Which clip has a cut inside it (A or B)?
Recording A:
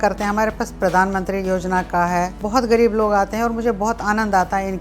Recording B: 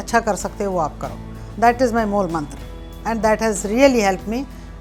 A